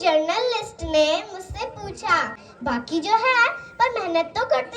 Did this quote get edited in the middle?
yes; 1 cut; at 2.4 s

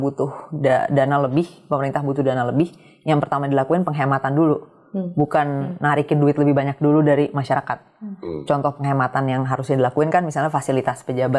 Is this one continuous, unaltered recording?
yes; 0 cuts

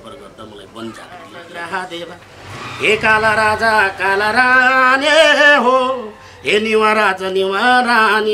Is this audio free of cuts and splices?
no; 1 cut; at 1.4 s

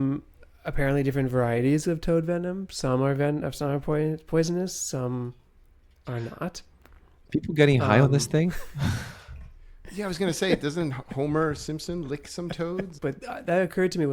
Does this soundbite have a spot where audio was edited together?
yes; 1 cut; at 12.9 s

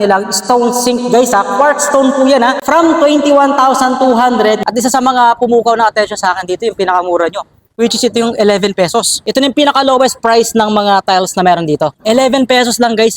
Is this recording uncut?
no; 4 cuts; at 2.6 s, 4.6 s, 9.2 s, 11.9 s

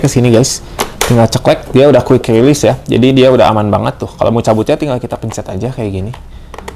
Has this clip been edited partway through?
no; 0 cuts

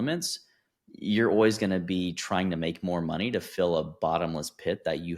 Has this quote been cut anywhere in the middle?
no; 0 cuts

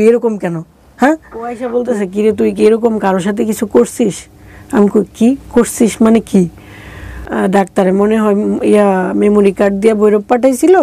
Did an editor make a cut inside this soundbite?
yes; 2 cuts; at 1.6 s, 7.2 s

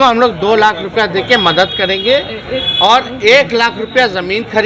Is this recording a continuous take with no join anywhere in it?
yes; 0 cuts

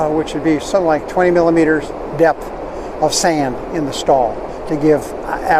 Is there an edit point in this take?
no; 0 cuts

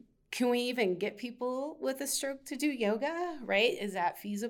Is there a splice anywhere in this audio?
no; 0 cuts

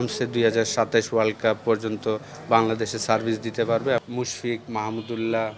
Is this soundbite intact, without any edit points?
no; 1 cut; at 4.0 s

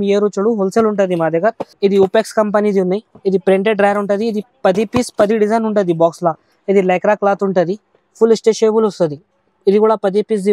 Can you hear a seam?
yes; 2 cuts; at 1.7 s, 6.5 s

